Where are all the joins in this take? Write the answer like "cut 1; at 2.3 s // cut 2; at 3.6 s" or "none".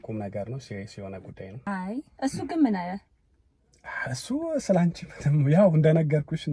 cut 1; at 1.7 s